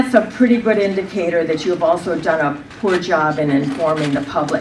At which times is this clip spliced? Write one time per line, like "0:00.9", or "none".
0:01.4